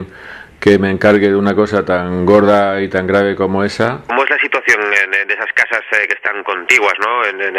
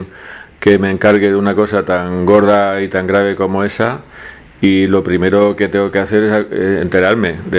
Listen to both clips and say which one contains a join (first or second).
second